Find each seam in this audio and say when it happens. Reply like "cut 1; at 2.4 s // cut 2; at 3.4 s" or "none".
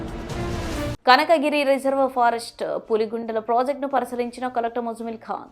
cut 1; at 0.9 s